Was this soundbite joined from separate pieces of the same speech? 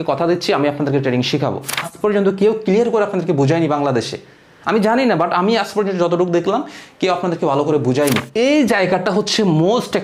yes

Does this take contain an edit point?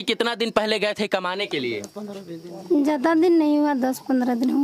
no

